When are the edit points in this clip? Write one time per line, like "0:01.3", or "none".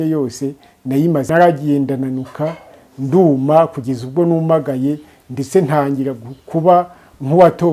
0:01.3